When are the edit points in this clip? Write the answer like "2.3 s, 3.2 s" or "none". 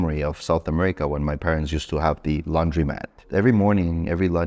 3.2 s